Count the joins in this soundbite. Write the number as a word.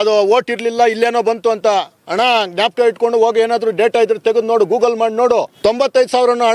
one